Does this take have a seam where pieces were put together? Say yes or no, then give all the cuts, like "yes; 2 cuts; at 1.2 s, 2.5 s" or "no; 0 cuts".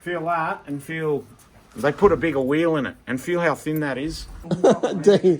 yes; 1 cut; at 4.4 s